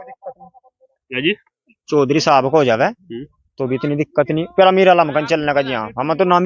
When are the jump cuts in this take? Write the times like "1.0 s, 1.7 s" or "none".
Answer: none